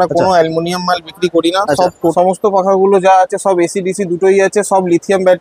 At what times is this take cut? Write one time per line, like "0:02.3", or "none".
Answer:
0:02.0